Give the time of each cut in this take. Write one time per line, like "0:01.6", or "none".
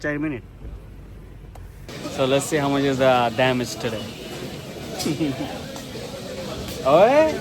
0:01.8